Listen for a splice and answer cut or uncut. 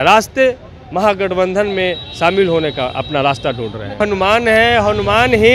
cut